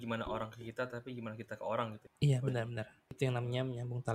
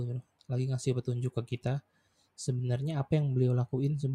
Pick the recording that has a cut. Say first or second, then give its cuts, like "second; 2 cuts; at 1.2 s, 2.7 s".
first; 2 cuts; at 2.0 s, 3.2 s